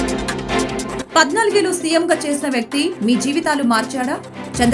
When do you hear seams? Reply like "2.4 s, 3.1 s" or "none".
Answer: 1.0 s

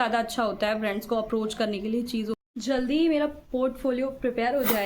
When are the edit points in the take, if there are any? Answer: 2.4 s

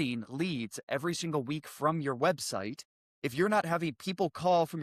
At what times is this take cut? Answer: none

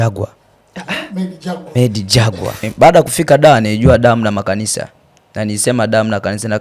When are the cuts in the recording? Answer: 2.7 s

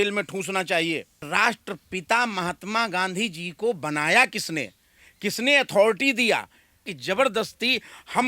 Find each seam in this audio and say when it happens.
1.3 s, 7.0 s

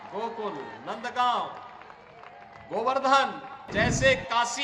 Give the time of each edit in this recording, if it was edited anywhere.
3.6 s

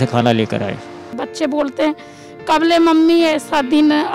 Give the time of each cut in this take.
0.9 s

